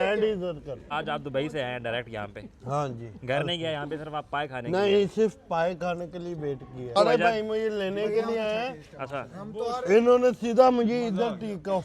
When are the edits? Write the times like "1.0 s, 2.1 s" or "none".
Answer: 0.8 s, 7.0 s